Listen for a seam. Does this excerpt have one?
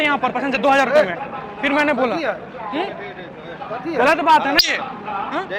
no; 0 cuts

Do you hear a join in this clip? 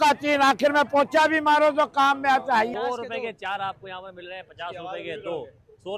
yes; 1 cut; at 2.7 s

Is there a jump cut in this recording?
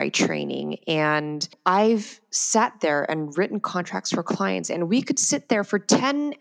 no; 0 cuts

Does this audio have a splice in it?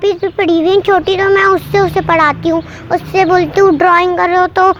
no; 0 cuts

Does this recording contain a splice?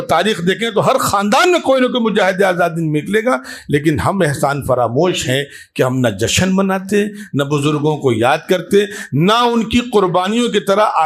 no; 0 cuts

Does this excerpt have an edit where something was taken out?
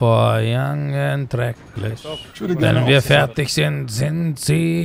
yes; 1 cut; at 2.3 s

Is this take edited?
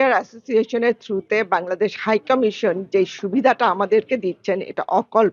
no; 0 cuts

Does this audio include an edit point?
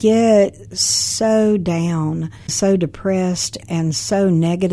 yes; 1 cut; at 2.5 s

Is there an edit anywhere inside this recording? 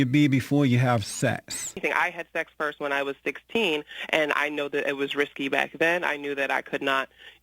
yes; 1 cut; at 1.8 s

